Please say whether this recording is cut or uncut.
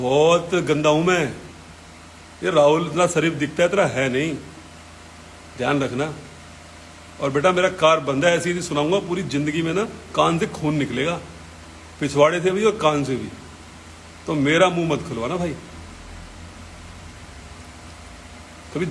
uncut